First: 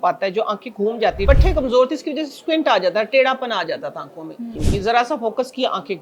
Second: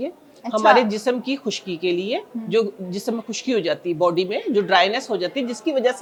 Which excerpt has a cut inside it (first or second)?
first